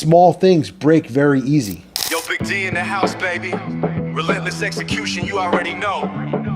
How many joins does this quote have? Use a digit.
1